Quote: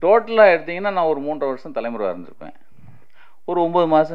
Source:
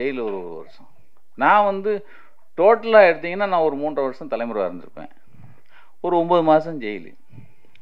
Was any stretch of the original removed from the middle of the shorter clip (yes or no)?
no